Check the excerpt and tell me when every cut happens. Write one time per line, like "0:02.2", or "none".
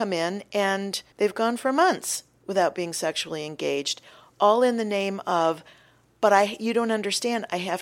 0:01.0